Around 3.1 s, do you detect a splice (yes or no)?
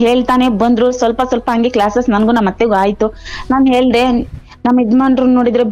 no